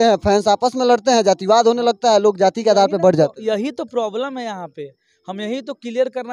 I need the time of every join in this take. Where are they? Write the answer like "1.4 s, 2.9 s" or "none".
none

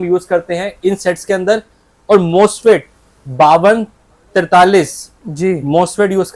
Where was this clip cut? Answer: none

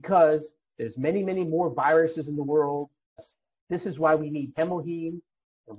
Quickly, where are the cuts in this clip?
3.3 s

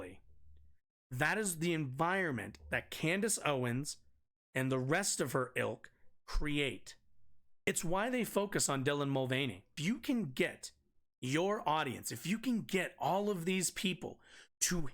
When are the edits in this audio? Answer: 7.7 s, 9.8 s

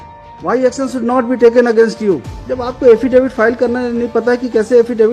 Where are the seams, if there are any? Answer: 2.3 s

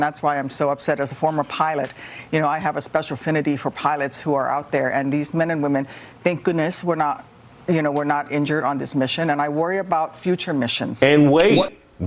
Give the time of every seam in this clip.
10.8 s

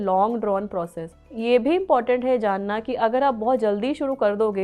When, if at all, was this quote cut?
1.4 s

